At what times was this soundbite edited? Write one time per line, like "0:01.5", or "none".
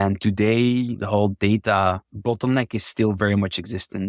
0:01.0
0:02.1